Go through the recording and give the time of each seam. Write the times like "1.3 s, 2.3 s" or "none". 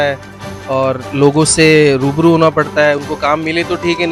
none